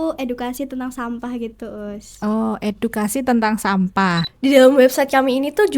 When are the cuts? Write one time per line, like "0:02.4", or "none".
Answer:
0:04.3